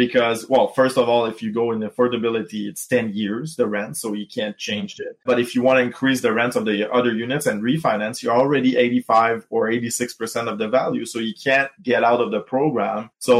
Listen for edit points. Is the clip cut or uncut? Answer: uncut